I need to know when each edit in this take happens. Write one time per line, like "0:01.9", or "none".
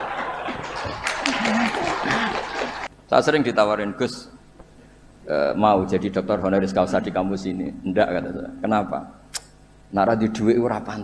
0:02.8